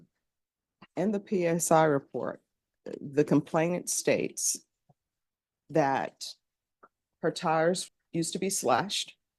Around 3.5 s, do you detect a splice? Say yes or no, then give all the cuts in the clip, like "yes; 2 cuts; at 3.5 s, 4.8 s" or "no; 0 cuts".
no; 1 cut; at 7.9 s